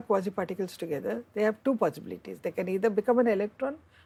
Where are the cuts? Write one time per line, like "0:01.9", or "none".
none